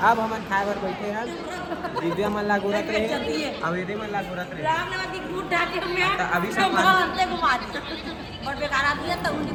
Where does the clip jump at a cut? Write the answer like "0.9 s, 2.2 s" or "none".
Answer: none